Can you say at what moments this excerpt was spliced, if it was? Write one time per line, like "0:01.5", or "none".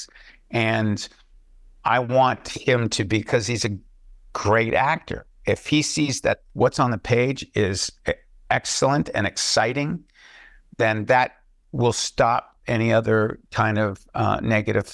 none